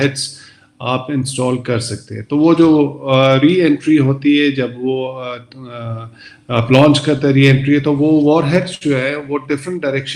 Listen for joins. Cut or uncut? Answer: uncut